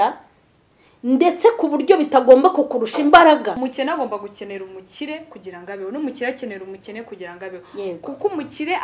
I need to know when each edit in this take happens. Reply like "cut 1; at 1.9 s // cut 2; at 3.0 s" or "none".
cut 1; at 3.6 s